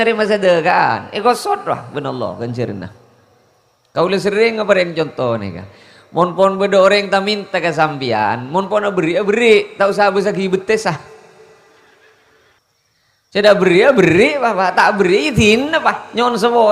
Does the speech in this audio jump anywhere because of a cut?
yes; 1 cut; at 12.6 s

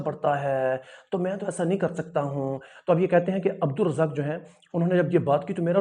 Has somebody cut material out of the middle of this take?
no; 0 cuts

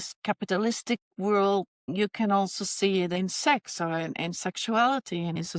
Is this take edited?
no; 0 cuts

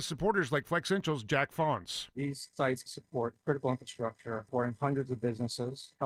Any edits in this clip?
no; 0 cuts

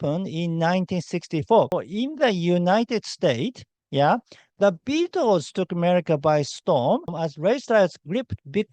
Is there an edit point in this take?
yes; 2 cuts; at 1.7 s, 7.1 s

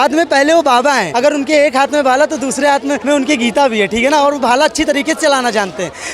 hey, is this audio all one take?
no; 2 cuts; at 1.1 s, 3.0 s

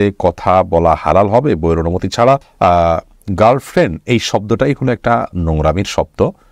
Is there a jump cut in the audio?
no; 0 cuts

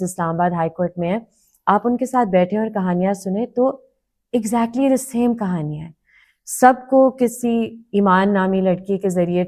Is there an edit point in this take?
no; 0 cuts

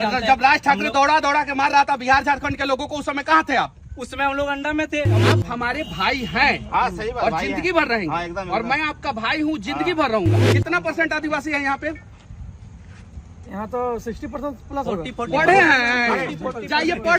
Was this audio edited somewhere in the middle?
yes; 2 cuts; at 5.2 s, 10.5 s

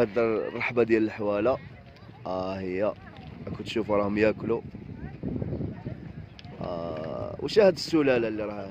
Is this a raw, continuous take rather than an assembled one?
yes; 0 cuts

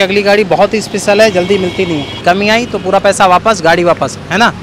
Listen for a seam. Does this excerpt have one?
yes; 1 cut; at 2.1 s

